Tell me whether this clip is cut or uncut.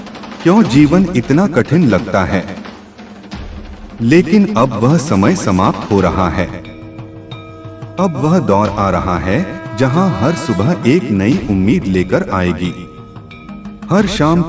uncut